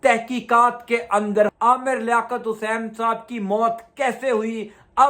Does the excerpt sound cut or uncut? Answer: cut